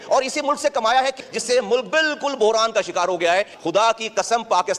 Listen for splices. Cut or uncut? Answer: cut